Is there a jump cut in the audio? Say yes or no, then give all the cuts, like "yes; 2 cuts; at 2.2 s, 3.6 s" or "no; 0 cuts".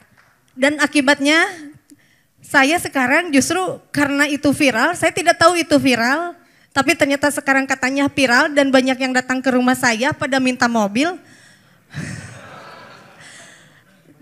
no; 0 cuts